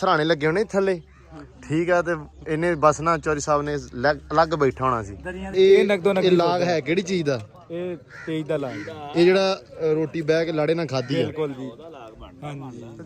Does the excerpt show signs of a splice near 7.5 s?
no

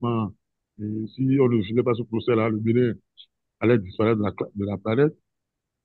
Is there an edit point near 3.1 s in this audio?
no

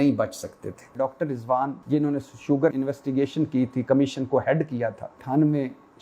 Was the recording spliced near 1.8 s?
yes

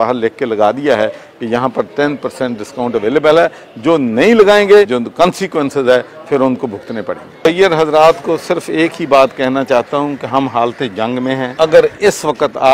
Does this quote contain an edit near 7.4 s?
yes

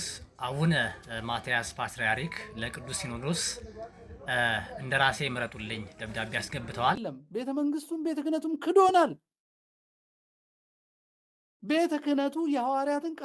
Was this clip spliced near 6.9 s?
yes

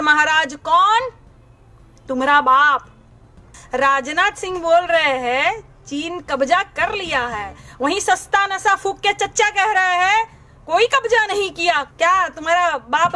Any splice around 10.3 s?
no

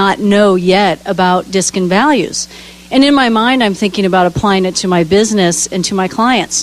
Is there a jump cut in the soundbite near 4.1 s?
yes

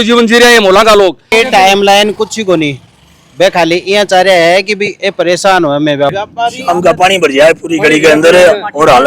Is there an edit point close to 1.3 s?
yes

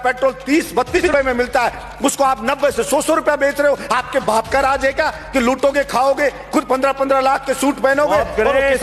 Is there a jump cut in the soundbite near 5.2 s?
no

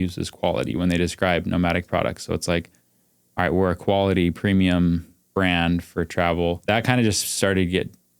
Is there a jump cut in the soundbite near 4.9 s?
no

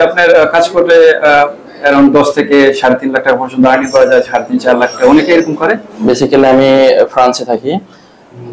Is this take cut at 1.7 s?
no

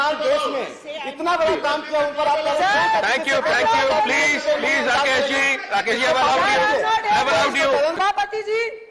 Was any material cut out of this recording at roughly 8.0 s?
yes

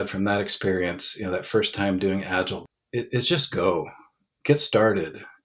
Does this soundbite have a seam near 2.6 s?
yes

